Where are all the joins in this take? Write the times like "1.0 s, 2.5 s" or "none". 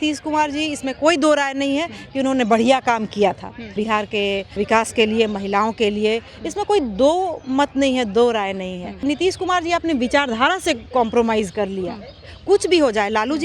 3.9 s, 9.0 s